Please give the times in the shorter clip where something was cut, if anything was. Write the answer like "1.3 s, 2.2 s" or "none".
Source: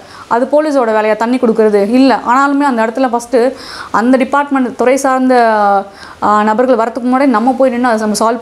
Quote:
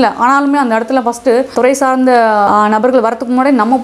1.5 s, 2.5 s